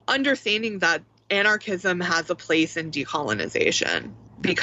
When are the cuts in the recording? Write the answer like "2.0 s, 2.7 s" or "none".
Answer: none